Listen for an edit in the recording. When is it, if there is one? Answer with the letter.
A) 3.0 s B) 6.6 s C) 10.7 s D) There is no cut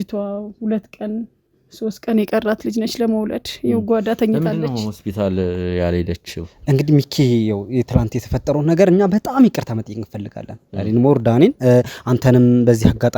B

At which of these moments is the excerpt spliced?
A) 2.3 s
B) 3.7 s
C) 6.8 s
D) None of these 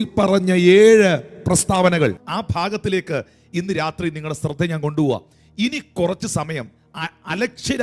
A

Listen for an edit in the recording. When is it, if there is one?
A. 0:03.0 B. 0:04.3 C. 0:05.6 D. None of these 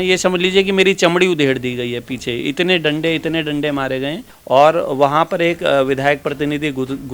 B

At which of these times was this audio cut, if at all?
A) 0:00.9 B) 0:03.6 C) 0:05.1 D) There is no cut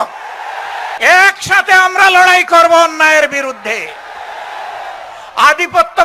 A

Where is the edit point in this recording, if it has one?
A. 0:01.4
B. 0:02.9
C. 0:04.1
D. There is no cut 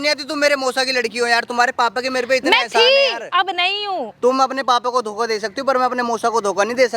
C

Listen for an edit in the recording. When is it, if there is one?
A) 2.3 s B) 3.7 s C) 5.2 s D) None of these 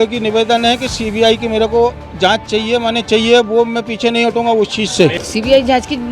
C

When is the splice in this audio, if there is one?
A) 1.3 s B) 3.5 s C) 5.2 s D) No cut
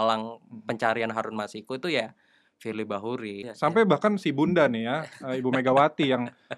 B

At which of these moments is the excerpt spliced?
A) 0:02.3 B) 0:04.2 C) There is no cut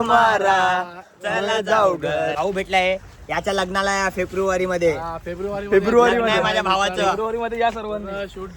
A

